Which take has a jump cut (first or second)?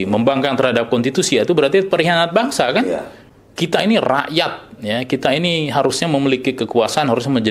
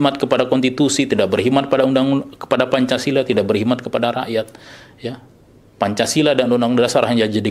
first